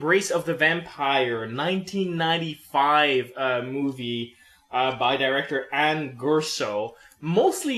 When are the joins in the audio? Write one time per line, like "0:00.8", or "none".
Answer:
0:05.0